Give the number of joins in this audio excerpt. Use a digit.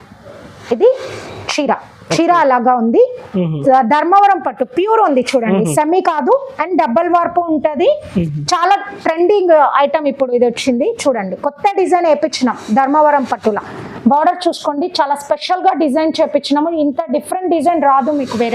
0